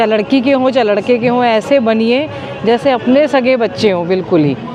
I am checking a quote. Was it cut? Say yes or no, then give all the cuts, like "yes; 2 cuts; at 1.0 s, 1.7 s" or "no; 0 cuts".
no; 0 cuts